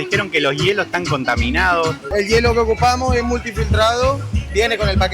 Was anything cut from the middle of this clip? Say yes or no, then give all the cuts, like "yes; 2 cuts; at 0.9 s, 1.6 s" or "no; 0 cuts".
yes; 1 cut; at 2.1 s